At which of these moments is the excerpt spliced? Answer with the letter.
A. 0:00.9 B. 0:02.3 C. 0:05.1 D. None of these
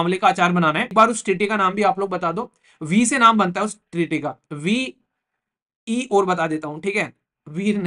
A